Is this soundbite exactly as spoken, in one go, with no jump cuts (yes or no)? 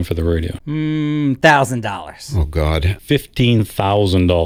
yes